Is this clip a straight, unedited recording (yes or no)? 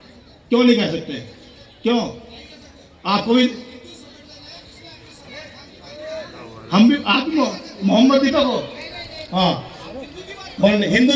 yes